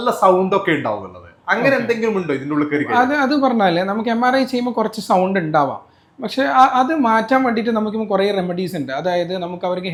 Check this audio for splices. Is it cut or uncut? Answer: uncut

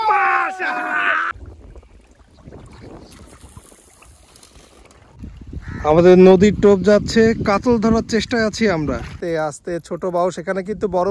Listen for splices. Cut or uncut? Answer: cut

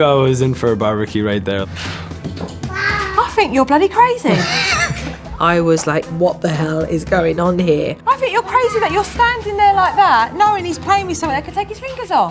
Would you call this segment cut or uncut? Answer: uncut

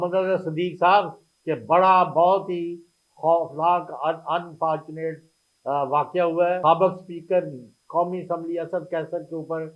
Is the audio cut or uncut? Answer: cut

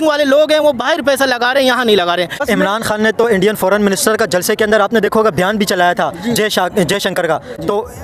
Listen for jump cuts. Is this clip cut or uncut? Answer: uncut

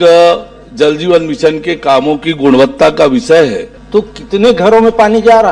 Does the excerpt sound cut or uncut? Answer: cut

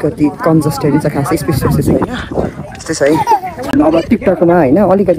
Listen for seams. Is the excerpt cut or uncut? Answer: cut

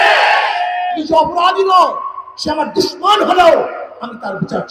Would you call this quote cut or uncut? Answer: uncut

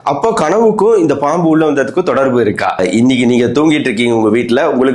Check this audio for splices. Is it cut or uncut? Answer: cut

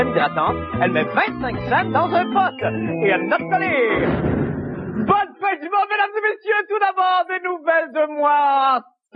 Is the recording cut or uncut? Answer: cut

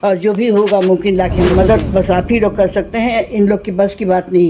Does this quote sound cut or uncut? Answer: cut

